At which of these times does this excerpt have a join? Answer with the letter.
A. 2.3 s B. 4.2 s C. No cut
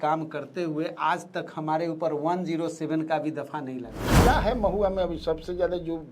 B